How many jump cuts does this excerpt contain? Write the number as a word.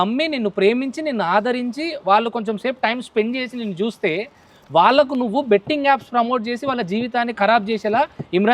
zero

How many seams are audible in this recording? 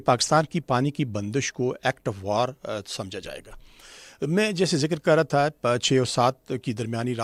zero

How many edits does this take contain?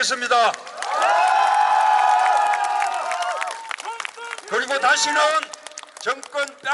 zero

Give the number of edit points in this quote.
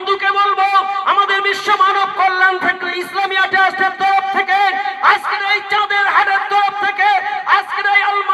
zero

